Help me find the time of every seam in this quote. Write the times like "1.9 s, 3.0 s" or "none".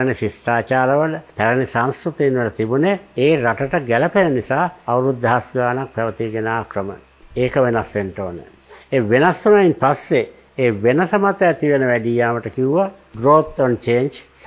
none